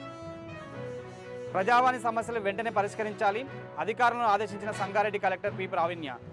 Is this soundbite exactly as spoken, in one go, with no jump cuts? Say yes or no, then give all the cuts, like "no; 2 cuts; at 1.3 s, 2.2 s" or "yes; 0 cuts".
no; 1 cut; at 1.4 s